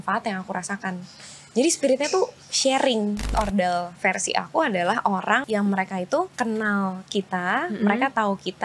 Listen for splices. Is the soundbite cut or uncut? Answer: cut